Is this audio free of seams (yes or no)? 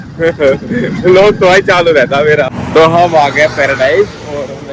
no